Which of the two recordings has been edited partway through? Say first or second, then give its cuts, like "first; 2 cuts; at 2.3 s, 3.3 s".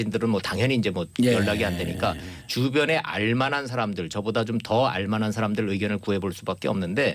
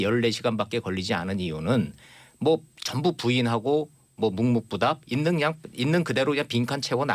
first; 1 cut; at 4.8 s